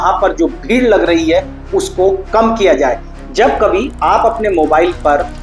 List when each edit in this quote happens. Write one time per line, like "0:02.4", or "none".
0:03.1